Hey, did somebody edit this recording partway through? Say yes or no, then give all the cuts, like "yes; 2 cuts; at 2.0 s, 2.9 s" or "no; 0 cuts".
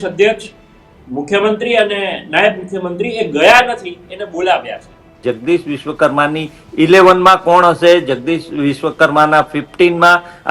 yes; 1 cut; at 5.2 s